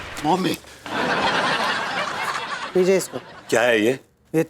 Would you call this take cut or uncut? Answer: uncut